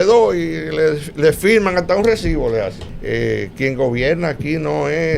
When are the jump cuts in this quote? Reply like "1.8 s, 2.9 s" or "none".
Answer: 2.8 s